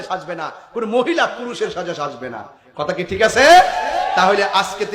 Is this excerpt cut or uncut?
uncut